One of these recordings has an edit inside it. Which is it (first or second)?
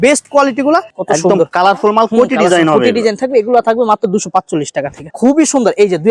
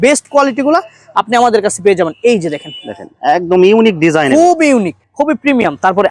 first